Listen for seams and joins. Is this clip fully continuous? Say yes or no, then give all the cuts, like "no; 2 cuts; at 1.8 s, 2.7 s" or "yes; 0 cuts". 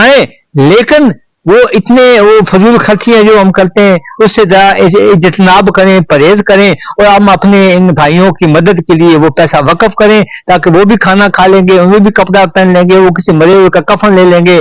yes; 0 cuts